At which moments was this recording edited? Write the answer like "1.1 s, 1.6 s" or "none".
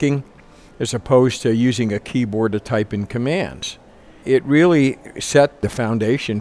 4.2 s, 5.6 s